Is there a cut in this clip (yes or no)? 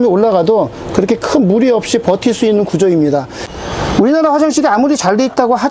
yes